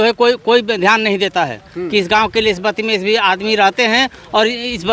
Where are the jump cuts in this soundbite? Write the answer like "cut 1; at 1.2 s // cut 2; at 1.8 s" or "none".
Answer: none